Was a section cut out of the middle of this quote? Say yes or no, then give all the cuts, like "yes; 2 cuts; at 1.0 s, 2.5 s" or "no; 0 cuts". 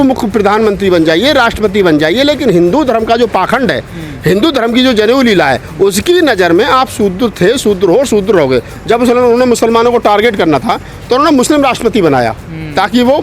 yes; 1 cut; at 8.7 s